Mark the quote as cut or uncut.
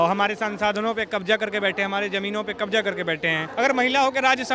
cut